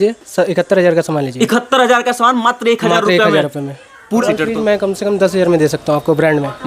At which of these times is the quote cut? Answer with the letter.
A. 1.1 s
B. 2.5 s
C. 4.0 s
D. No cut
C